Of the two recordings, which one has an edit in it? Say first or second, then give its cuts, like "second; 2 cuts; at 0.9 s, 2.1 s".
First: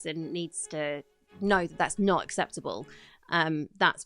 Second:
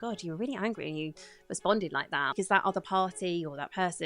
second; 1 cut; at 2.3 s